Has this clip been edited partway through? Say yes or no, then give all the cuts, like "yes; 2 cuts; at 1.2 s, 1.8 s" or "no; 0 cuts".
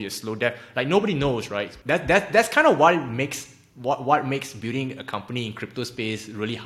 yes; 1 cut; at 1.7 s